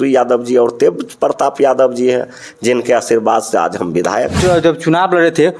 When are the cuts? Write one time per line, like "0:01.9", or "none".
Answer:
0:04.3